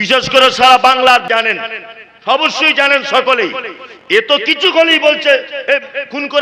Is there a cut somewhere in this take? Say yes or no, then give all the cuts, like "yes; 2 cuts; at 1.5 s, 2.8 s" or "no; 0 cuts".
yes; 1 cut; at 1.3 s